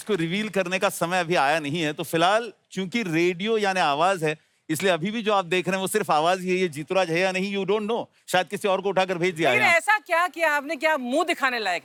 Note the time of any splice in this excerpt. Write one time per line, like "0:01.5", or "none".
none